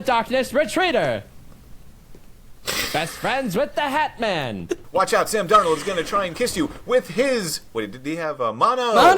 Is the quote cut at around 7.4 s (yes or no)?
no